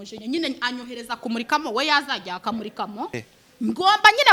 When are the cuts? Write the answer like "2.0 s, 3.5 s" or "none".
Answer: 3.1 s